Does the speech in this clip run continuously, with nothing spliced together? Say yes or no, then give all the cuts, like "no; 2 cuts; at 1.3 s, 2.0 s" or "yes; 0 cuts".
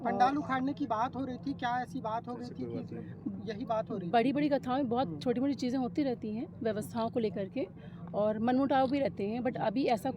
yes; 0 cuts